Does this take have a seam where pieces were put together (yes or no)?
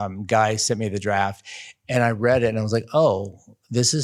no